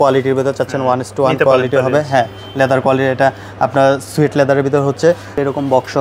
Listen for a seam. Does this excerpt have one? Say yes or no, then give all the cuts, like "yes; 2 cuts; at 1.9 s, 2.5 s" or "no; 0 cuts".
no; 0 cuts